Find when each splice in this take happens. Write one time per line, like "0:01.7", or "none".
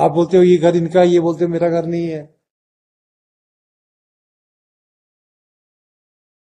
none